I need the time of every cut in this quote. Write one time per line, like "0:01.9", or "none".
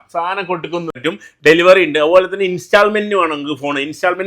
0:00.9